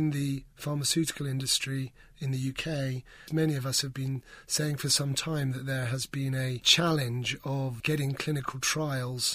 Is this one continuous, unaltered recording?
no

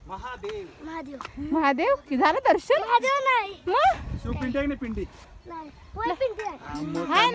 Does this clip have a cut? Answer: no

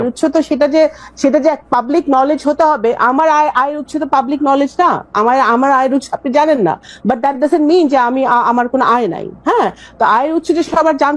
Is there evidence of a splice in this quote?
no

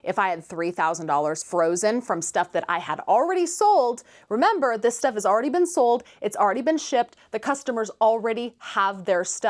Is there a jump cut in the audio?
no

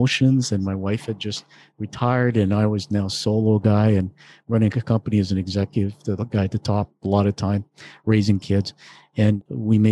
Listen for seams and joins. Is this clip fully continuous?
yes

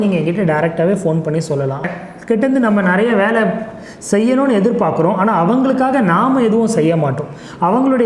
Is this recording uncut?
no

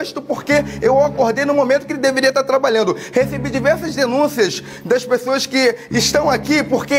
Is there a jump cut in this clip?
no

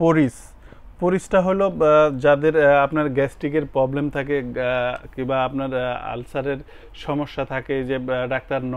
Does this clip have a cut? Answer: no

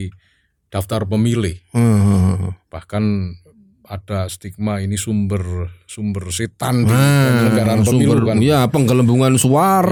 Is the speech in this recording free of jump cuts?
yes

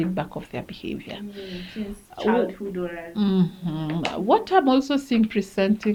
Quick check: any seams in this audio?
no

